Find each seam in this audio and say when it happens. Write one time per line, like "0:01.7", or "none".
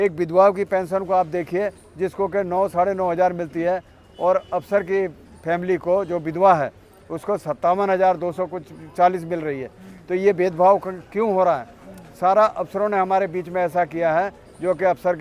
none